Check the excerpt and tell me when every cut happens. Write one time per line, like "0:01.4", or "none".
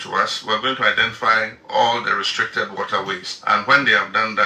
none